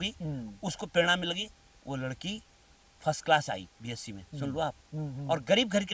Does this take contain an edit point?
no; 0 cuts

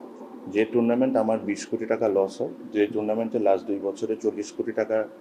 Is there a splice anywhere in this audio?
no; 0 cuts

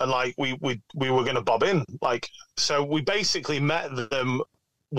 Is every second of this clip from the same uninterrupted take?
yes; 0 cuts

